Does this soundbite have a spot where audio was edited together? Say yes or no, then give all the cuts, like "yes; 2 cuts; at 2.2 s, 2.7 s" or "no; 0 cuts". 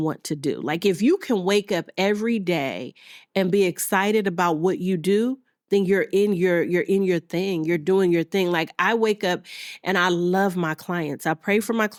no; 0 cuts